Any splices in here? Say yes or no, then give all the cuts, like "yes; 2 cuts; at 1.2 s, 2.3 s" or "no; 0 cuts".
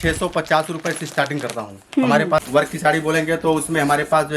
yes; 1 cut; at 2.5 s